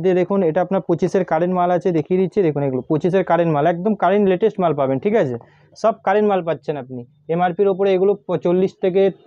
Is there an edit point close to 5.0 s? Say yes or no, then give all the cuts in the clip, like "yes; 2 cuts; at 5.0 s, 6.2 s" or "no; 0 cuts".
no; 0 cuts